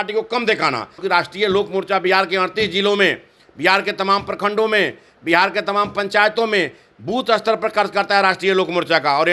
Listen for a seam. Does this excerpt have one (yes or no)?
yes